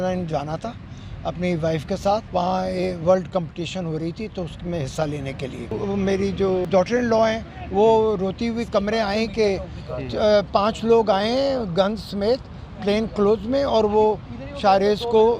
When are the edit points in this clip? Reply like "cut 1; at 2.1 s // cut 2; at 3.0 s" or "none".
cut 1; at 2.3 s // cut 2; at 5.7 s // cut 3; at 6.7 s